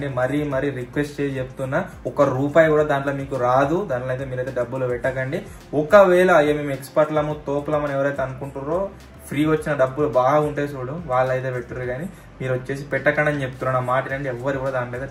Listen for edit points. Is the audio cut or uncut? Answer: uncut